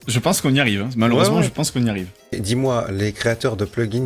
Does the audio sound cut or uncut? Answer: cut